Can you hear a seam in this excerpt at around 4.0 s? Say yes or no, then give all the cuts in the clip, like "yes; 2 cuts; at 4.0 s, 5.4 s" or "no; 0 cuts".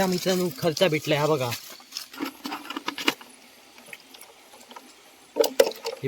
no; 1 cut; at 2.1 s